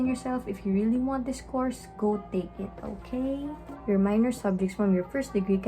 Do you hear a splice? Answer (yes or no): yes